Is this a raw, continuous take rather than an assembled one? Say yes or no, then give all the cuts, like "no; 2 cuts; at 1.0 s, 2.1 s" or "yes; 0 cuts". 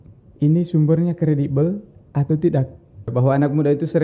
no; 1 cut; at 3.1 s